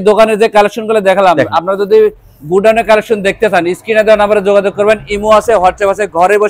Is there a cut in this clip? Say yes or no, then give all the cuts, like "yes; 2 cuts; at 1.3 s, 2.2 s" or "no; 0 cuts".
no; 0 cuts